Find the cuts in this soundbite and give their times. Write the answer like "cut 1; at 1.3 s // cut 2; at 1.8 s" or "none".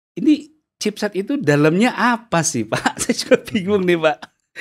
none